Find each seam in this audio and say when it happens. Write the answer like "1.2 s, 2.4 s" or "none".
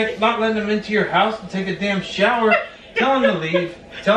none